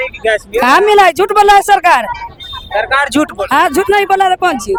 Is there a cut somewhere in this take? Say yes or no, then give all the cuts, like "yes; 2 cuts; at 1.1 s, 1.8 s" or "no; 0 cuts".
no; 0 cuts